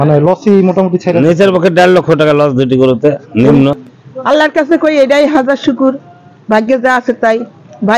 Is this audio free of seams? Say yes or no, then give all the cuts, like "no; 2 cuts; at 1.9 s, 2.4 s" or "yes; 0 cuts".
no; 1 cut; at 3.8 s